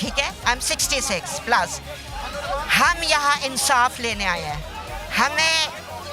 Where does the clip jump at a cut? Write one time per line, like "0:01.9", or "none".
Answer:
none

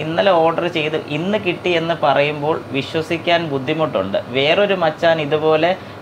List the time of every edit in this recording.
none

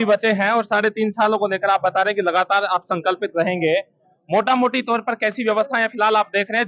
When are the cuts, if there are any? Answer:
none

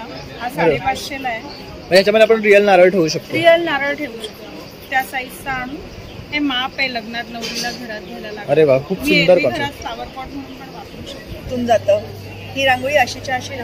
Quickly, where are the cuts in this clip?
0:11.5

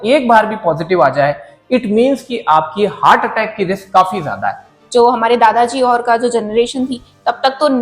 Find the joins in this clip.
0:04.7

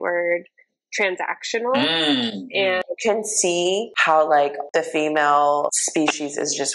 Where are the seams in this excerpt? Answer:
0:02.8
0:03.9
0:04.6
0:05.8

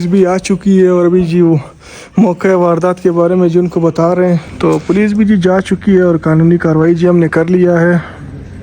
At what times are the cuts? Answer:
0:04.5

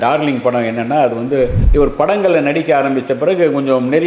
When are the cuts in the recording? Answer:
0:01.6

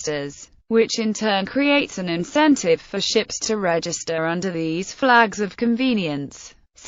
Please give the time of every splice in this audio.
none

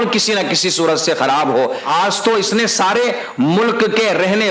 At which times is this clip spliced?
0:01.9

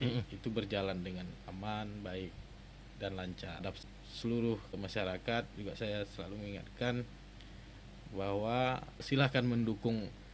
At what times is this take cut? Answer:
0:03.7
0:04.8
0:09.0

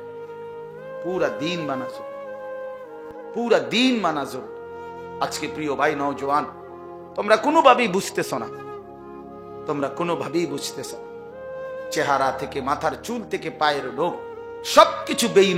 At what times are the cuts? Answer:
0:10.6
0:11.9

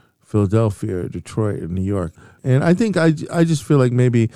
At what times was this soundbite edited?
0:02.3

